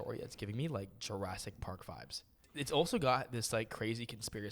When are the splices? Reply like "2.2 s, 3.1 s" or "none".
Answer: 2.4 s